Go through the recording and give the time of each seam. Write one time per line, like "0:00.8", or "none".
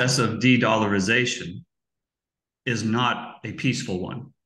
none